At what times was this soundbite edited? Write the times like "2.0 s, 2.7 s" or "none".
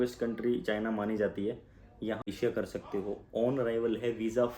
2.3 s